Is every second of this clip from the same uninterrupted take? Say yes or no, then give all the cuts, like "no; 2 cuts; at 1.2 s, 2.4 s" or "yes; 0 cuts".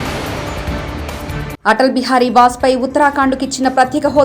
yes; 0 cuts